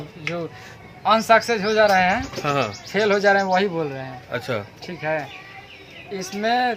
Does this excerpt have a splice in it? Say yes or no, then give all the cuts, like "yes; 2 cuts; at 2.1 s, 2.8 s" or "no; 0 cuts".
no; 0 cuts